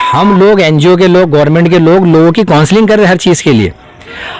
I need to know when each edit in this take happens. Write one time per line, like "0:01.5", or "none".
none